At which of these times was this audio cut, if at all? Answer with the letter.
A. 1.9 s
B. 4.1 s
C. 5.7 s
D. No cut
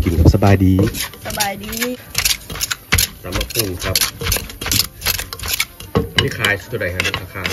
A